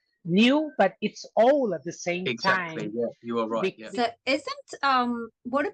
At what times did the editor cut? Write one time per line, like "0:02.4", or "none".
0:03.8